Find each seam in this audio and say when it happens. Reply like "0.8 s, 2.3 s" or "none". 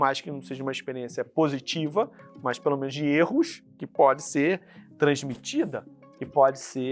none